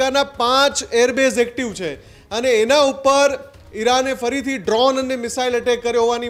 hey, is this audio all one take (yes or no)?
yes